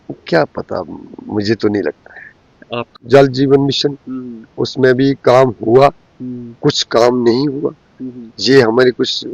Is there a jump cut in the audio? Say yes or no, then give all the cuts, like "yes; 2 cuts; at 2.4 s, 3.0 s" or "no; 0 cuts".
yes; 1 cut; at 2.9 s